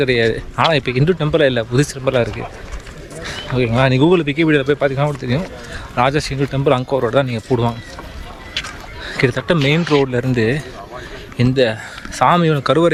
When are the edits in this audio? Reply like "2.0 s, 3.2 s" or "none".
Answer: none